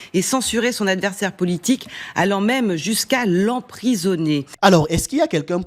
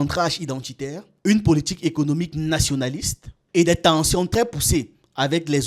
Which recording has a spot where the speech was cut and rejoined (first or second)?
first